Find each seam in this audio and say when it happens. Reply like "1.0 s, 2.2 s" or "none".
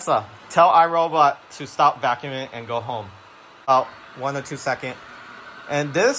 3.7 s